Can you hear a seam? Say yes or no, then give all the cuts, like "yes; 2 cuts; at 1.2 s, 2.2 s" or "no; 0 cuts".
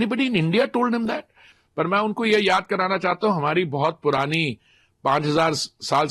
yes; 1 cut; at 1.5 s